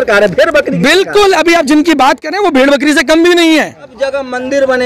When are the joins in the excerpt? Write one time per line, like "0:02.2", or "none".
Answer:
0:03.9